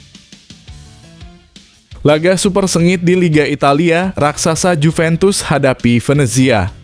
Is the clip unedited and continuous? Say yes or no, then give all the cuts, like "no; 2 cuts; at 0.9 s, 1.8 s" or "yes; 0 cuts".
no; 1 cut; at 2.0 s